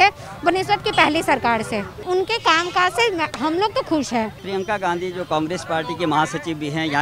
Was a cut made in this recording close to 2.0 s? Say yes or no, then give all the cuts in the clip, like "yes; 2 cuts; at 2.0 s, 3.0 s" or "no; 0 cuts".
yes; 2 cuts; at 2.0 s, 4.4 s